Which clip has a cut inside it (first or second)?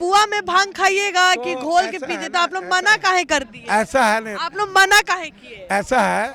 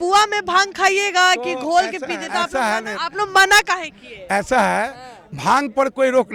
second